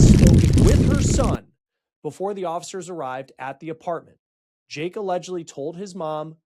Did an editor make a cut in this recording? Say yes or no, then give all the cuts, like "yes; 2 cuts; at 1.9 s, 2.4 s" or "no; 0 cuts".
yes; 1 cut; at 1.2 s